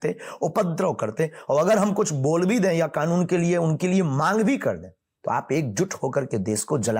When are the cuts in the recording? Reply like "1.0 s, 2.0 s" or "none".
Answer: none